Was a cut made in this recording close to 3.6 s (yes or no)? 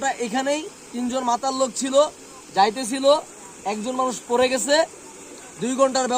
no